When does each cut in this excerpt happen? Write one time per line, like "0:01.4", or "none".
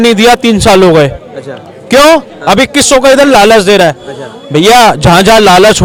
none